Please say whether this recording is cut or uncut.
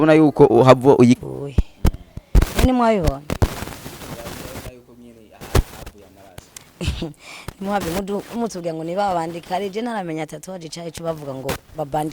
cut